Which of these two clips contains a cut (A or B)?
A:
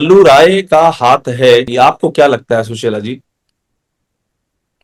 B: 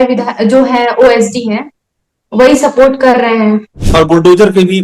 B